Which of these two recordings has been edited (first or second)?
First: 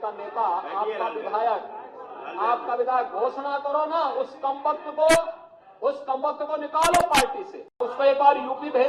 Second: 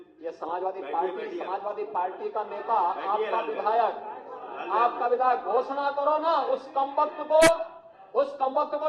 first